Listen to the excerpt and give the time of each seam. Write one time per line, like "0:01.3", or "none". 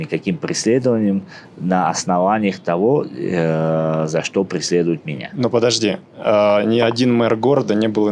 none